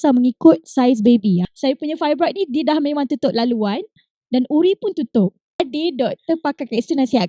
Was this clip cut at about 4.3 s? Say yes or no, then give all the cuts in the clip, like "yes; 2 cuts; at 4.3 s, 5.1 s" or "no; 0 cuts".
no; 2 cuts; at 1.4 s, 5.6 s